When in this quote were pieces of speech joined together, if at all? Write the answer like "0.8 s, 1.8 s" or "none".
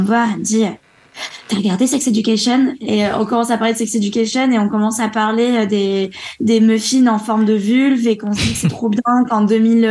2.8 s

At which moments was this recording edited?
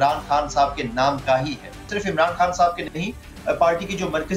1.9 s

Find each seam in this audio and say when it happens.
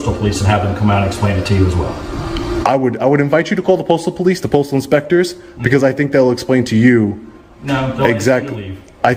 none

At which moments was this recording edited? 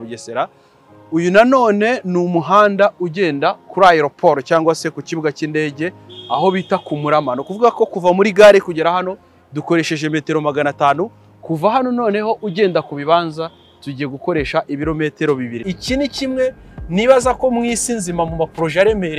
15.5 s

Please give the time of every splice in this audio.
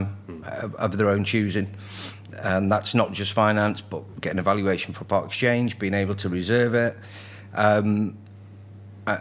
none

